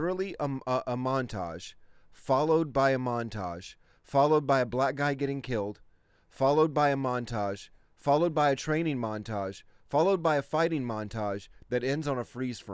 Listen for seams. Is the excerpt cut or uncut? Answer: uncut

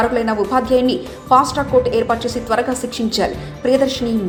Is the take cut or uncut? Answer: uncut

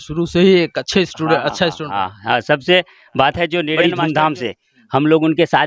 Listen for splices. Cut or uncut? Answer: cut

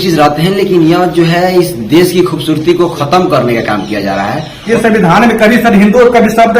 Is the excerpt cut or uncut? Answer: cut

